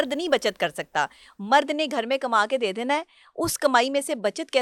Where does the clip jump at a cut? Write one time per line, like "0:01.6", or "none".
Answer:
none